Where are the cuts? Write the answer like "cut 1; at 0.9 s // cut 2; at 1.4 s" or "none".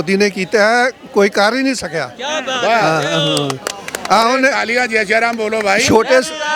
none